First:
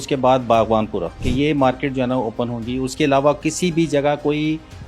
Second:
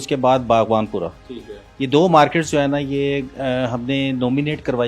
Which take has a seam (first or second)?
first